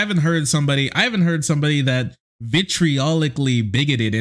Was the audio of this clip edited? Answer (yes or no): no